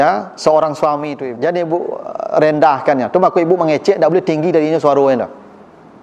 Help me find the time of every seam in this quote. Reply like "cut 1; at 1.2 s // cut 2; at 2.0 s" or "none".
cut 1; at 1.2 s